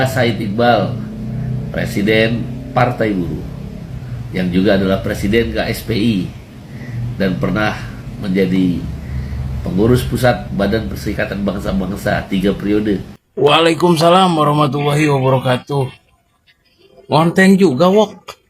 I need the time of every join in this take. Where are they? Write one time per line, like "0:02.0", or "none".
0:13.2